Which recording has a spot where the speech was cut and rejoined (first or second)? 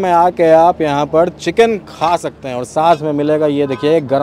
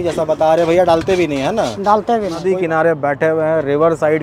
second